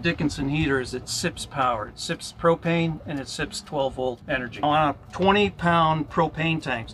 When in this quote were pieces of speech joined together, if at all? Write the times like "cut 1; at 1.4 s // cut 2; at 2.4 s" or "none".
cut 1; at 4.6 s